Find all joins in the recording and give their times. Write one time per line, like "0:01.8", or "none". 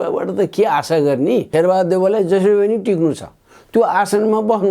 0:01.5